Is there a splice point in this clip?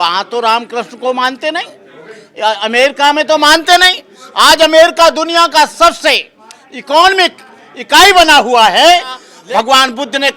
yes; 1 cut; at 9.3 s

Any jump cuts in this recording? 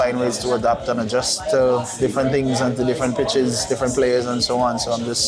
no; 0 cuts

